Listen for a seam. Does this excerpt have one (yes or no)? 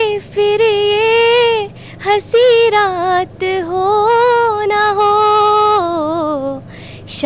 no